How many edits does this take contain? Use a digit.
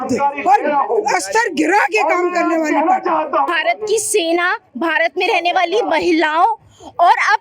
1